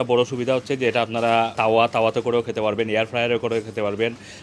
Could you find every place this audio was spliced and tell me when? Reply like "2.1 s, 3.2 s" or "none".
1.5 s